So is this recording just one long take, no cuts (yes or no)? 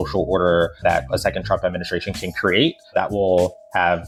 yes